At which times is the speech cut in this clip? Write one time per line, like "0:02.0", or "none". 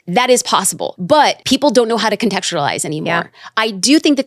0:01.3